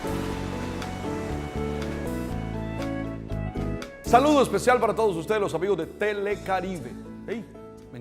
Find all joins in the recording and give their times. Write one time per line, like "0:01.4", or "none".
0:04.0